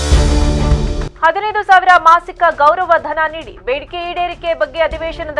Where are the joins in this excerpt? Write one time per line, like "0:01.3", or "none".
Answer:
0:01.1